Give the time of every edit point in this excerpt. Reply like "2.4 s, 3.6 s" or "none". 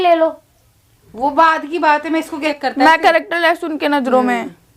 2.3 s